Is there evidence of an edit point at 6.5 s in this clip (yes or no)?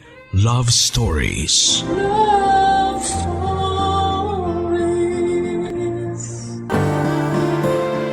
yes